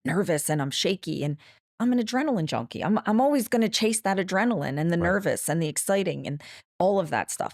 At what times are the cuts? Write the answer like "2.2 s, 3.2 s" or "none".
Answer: none

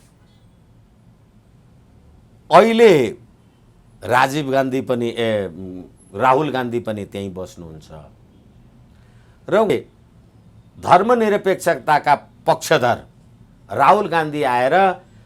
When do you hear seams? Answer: 9.7 s

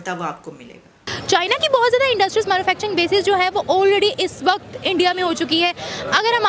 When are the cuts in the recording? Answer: 1.1 s

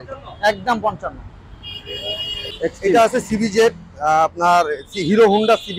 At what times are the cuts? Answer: none

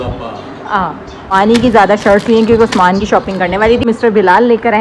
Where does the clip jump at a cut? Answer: 1.3 s, 3.9 s

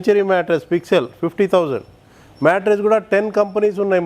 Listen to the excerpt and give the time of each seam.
none

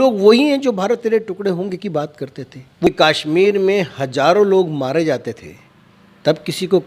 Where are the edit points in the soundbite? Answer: 2.9 s

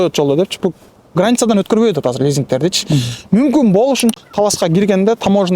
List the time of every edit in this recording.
4.2 s

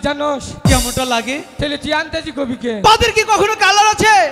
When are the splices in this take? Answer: none

